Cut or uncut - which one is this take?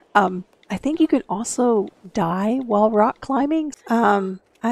cut